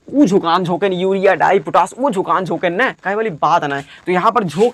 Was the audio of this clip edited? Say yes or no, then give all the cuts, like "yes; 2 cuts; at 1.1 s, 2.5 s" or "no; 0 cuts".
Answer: no; 0 cuts